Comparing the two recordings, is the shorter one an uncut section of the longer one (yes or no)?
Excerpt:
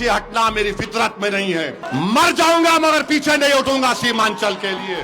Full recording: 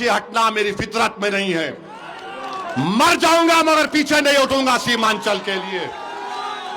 no